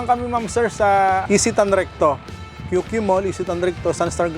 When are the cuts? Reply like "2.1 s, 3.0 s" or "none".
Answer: 1.2 s